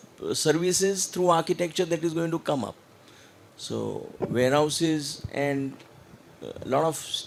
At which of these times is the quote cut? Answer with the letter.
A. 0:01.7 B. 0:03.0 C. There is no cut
C